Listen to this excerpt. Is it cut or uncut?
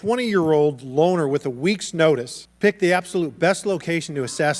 cut